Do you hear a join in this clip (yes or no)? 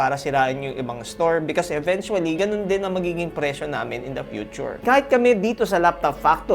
yes